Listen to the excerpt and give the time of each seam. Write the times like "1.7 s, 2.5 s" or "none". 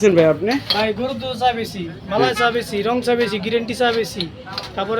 none